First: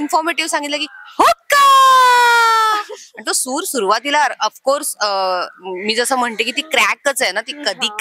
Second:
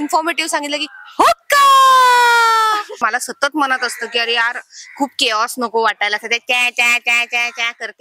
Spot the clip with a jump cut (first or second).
second